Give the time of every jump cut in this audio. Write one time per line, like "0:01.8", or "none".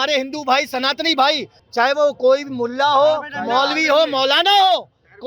0:01.5